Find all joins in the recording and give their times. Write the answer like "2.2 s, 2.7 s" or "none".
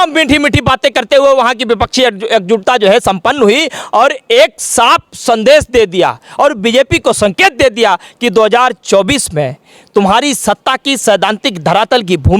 none